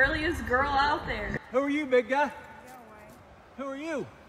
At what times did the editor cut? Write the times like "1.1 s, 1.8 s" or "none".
1.3 s